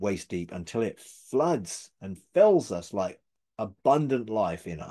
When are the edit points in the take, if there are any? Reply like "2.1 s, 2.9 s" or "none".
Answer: none